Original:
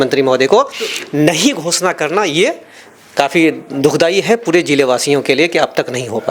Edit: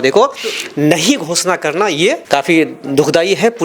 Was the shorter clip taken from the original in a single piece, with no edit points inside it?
no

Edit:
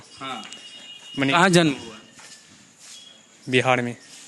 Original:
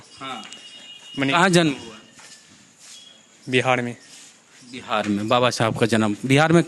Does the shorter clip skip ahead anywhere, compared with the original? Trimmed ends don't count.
no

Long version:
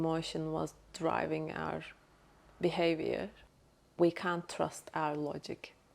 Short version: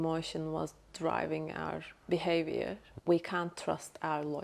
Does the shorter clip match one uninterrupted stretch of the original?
no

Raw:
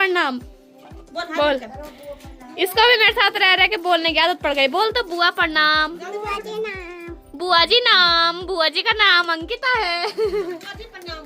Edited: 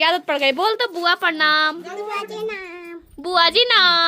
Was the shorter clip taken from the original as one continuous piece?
yes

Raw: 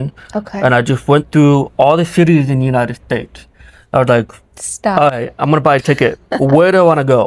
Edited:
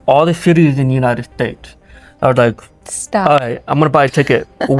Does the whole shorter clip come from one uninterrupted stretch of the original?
yes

